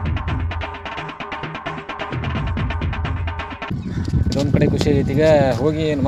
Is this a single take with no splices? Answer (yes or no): yes